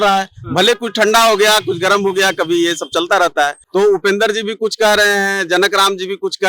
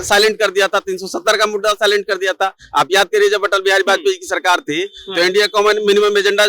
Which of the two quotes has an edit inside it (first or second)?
first